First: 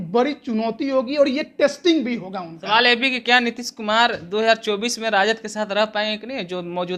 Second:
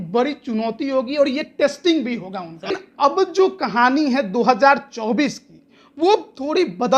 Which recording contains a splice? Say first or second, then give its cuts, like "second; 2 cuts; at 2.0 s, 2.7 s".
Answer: second; 1 cut; at 2.7 s